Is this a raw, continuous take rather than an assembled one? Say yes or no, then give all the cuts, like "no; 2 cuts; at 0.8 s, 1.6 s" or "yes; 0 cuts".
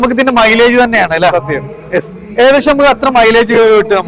yes; 0 cuts